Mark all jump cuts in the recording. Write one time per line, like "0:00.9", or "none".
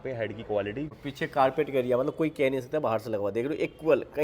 0:01.0